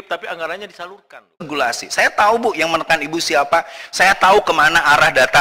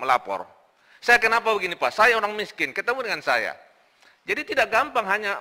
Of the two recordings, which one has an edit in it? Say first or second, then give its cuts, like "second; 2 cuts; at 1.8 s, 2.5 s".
first; 1 cut; at 1.5 s